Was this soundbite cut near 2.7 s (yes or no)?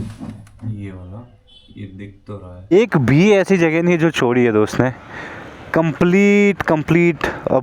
yes